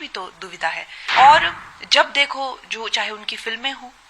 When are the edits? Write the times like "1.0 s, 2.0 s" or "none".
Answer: 0.9 s